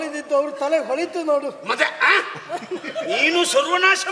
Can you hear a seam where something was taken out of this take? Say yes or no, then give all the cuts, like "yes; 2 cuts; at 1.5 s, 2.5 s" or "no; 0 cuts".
no; 0 cuts